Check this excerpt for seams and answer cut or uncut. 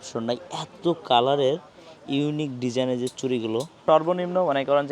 cut